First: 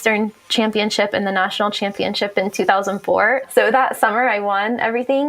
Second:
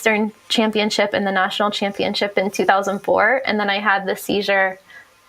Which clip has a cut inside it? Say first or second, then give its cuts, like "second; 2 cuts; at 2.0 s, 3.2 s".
first; 1 cut; at 3.5 s